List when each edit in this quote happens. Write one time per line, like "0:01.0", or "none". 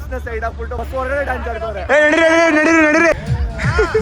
0:01.8
0:03.1